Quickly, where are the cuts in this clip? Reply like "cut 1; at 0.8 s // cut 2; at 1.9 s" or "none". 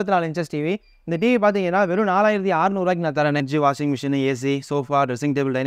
cut 1; at 3.5 s